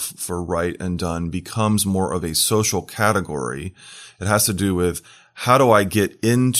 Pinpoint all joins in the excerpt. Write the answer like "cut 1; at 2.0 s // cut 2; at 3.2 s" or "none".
none